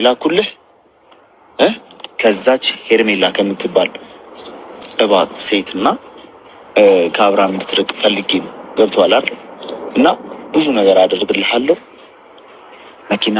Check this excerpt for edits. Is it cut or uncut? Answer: uncut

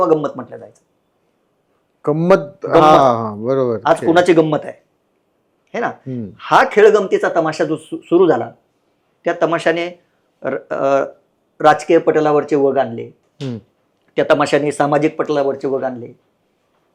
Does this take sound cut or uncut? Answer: uncut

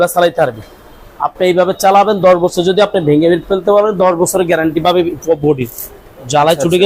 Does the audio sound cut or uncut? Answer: uncut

